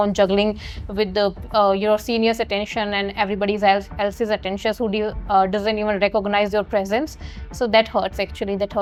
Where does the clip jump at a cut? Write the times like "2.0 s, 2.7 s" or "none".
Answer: none